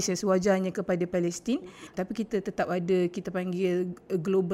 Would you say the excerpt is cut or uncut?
cut